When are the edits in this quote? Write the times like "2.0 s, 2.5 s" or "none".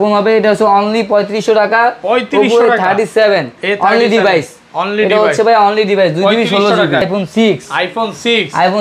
7.0 s